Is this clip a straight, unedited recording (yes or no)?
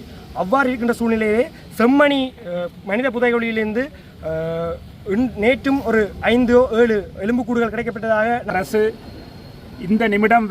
no